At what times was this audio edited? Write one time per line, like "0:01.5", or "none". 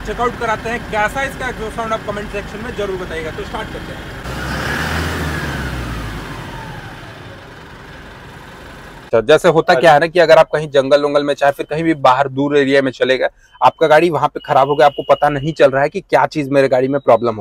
0:04.2
0:09.1